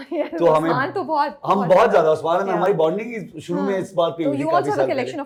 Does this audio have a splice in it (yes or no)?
no